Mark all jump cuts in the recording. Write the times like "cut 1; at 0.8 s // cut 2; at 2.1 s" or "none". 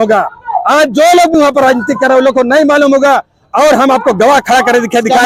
none